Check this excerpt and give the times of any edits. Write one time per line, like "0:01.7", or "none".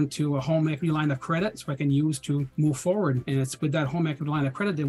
0:02.5
0:03.2